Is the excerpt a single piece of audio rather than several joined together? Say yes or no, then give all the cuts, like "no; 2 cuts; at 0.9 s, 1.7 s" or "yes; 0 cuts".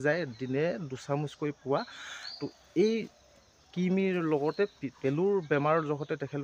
no; 1 cut; at 4.8 s